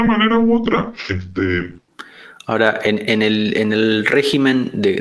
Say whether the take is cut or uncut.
cut